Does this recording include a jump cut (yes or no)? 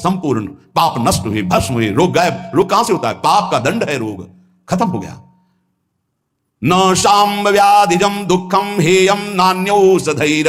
no